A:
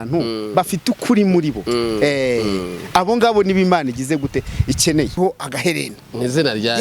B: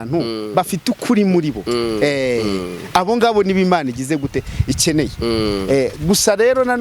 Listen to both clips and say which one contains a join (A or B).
A